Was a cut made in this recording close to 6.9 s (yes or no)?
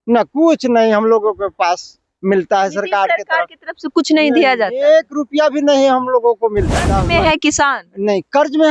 yes